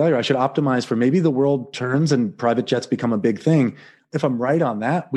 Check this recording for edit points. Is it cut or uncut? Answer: cut